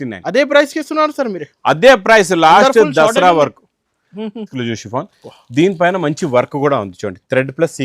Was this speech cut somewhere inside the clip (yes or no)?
yes